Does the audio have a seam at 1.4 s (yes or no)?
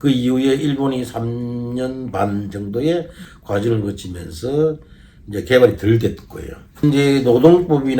no